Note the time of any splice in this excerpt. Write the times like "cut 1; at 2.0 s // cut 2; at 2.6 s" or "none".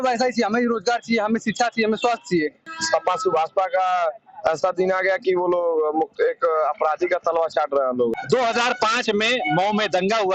cut 1; at 2.6 s // cut 2; at 8.1 s

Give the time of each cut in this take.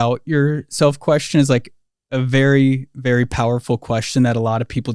none

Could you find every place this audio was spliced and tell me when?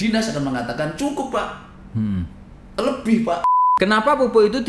cut 1; at 3.5 s

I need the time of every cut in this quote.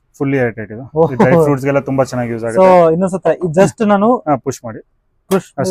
none

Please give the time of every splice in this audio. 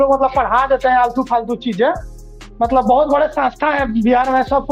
none

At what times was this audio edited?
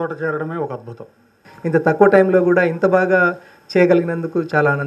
cut 1; at 1.4 s

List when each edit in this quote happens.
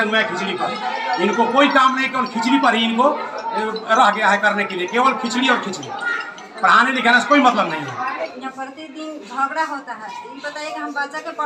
cut 1; at 8.3 s

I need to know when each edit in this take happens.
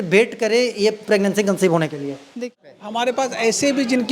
cut 1; at 2.3 s

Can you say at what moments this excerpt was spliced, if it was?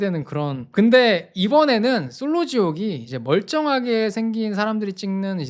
none

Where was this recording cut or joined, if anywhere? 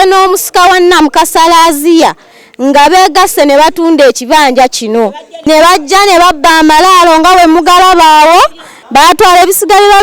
cut 1; at 8.8 s

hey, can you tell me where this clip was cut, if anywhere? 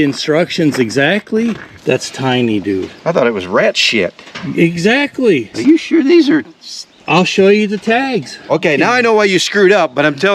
cut 1; at 1.7 s // cut 2; at 5.5 s // cut 3; at 8.5 s

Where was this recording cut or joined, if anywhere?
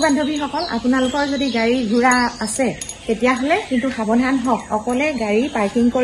none

